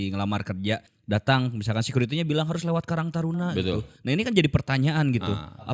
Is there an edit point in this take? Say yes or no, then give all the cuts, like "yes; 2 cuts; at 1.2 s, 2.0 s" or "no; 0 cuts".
yes; 1 cut; at 0.9 s